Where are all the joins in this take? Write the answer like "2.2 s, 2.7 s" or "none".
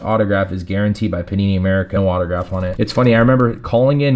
2.2 s